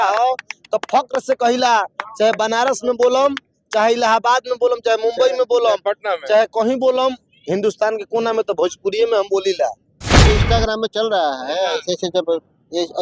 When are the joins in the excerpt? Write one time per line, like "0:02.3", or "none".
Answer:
0:10.1